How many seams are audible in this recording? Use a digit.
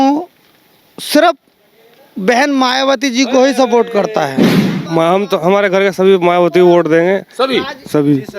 1